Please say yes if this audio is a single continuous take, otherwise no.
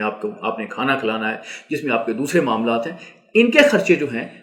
yes